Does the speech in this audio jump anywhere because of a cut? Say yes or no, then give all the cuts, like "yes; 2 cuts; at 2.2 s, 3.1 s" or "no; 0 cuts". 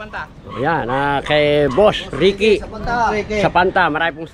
no; 0 cuts